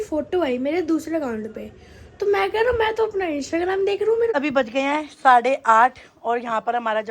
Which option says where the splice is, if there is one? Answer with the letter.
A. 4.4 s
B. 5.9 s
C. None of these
A